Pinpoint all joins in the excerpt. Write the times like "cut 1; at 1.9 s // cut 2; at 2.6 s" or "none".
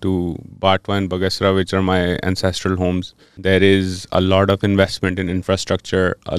cut 1; at 3.3 s